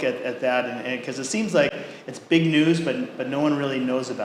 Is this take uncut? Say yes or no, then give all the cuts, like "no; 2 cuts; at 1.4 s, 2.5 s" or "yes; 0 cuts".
yes; 0 cuts